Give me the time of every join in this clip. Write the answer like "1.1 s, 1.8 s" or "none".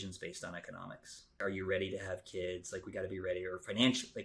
1.4 s